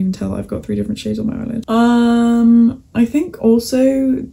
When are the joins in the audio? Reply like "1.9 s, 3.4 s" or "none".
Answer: 1.7 s